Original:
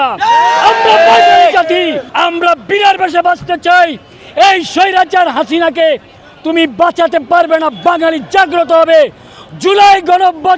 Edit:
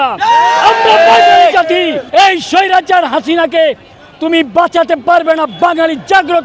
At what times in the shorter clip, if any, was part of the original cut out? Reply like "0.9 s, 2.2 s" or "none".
2.0 s

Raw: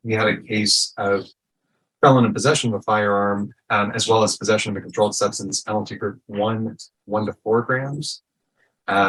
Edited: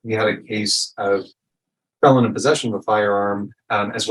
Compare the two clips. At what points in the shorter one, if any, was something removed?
none

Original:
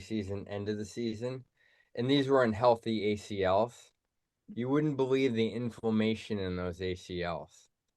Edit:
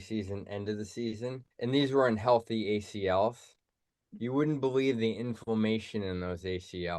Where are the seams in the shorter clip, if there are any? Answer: 1.5 s

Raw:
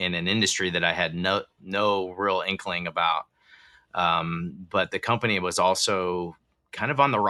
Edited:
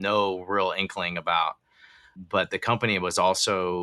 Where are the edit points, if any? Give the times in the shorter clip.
2.1 s

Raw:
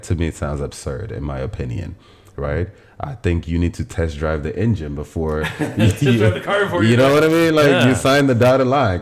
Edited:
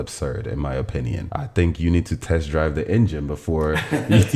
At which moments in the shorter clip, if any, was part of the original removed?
1.2 s

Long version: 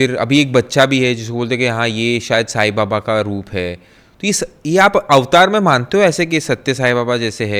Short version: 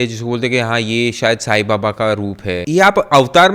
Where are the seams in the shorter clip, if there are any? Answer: 2.6 s

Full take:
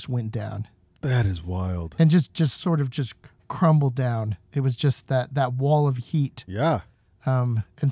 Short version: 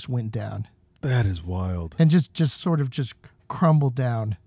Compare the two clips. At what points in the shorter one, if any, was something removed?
none

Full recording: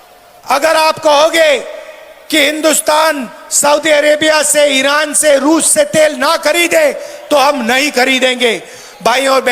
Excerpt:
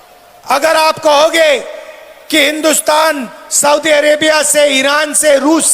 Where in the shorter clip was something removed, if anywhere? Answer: none

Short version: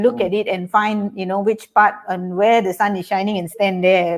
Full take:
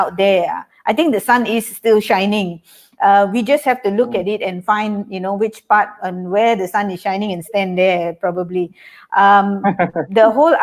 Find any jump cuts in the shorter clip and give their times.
none

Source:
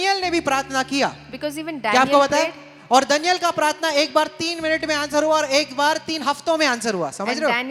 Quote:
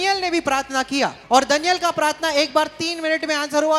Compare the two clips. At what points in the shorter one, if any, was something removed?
1.2 s

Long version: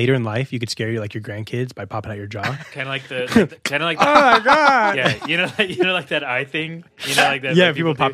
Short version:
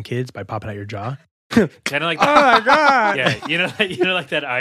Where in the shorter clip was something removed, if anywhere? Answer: 1.5 s

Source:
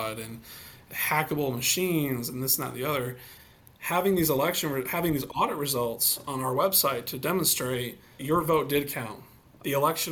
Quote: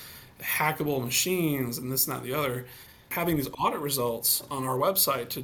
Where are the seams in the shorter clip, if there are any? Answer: 3.1 s

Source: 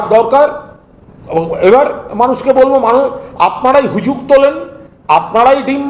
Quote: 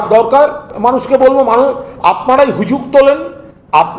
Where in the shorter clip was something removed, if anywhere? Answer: 1.0 s

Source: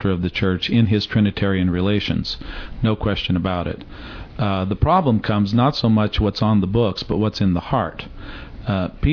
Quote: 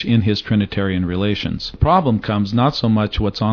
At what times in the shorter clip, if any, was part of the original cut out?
1.8 s

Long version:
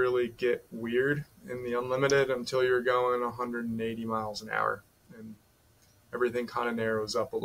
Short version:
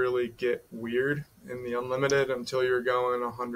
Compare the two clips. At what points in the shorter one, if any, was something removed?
none

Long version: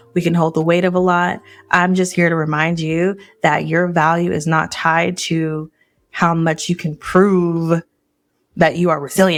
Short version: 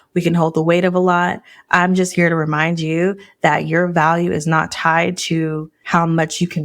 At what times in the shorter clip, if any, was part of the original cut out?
5.7 s

